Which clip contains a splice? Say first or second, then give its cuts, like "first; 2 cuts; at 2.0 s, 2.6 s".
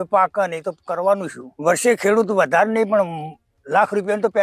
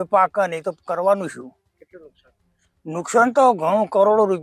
first; 1 cut; at 1.4 s